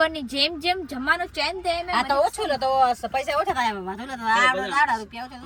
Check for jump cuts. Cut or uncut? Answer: uncut